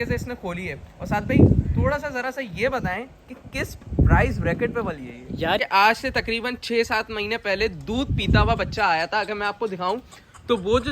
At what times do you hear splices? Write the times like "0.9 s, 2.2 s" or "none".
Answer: 5.6 s